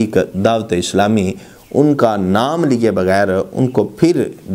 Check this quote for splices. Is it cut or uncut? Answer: uncut